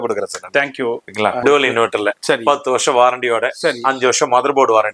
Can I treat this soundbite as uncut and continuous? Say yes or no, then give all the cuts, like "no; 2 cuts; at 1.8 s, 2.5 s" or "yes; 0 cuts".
no; 1 cut; at 1.4 s